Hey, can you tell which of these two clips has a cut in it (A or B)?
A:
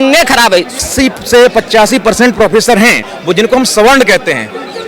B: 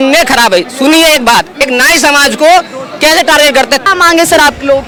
A